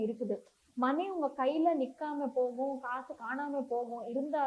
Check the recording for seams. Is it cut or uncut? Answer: uncut